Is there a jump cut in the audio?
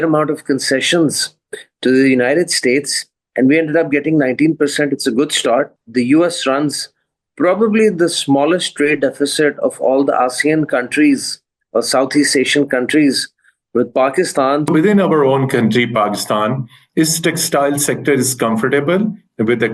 yes; 2 cuts; at 5.8 s, 14.7 s

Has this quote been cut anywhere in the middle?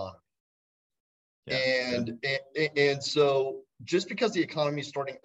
no; 0 cuts

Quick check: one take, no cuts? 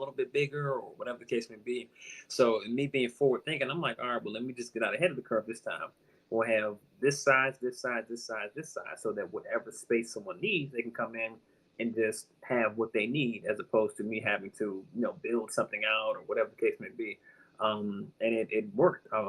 yes; 0 cuts

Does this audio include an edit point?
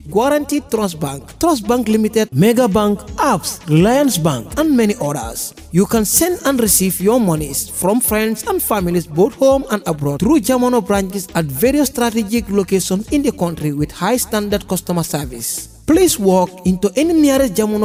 no; 0 cuts

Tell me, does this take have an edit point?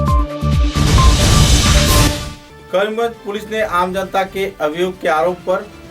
yes; 1 cut; at 2.2 s

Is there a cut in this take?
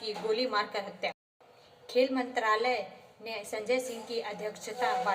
yes; 1 cut; at 1.3 s

